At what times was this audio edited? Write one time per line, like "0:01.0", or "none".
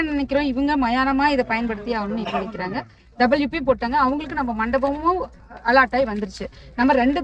none